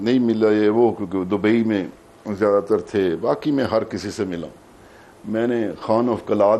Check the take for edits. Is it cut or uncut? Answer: uncut